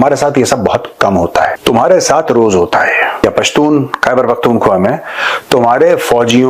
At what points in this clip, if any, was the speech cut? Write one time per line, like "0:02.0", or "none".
0:01.6
0:03.2